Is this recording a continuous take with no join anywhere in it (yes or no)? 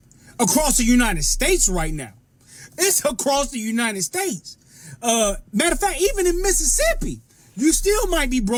yes